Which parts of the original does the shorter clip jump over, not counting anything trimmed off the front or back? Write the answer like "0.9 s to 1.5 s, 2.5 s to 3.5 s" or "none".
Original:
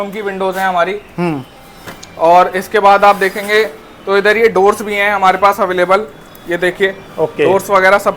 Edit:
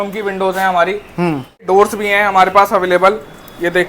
1.7 s to 4.5 s